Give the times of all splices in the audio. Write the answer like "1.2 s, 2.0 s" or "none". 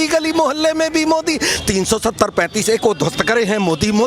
1.5 s